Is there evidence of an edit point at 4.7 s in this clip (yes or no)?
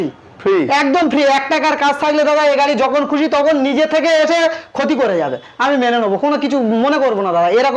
no